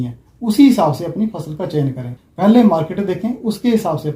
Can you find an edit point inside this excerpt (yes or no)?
yes